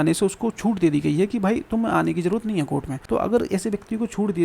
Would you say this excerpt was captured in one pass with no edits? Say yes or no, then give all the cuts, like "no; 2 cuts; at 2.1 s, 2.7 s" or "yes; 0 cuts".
no; 1 cut; at 2.9 s